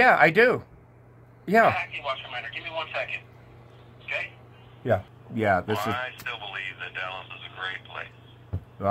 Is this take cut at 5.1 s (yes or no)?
yes